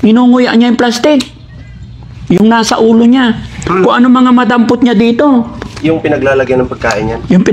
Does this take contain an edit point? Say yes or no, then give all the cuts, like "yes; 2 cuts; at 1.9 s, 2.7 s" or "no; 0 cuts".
no; 0 cuts